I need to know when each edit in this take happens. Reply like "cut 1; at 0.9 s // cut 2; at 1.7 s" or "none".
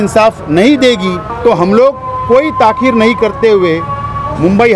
cut 1; at 1.3 s